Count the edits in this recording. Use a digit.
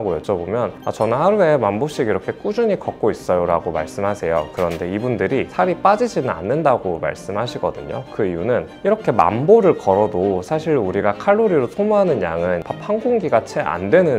2